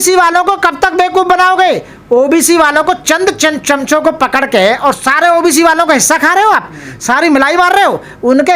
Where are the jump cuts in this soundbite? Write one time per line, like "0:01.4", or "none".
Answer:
none